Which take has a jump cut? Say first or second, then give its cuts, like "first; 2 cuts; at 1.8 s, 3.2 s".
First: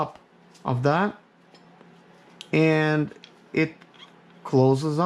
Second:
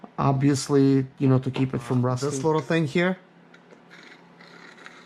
second; 1 cut; at 2.2 s